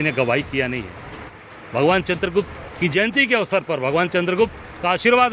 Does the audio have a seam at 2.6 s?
no; 1 cut; at 1.2 s

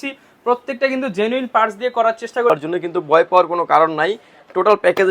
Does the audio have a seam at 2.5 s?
yes; 1 cut; at 2.5 s

